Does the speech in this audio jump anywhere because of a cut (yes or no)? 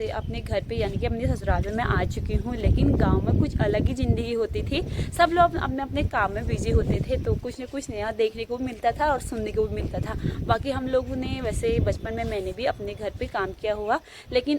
no